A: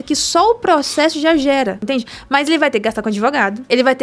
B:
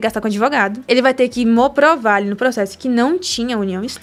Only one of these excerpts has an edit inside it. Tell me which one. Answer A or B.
A